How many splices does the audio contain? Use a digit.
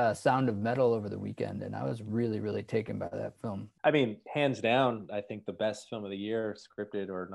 1